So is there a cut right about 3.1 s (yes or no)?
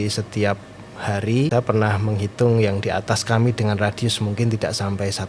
no